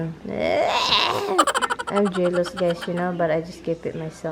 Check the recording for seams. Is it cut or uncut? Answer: cut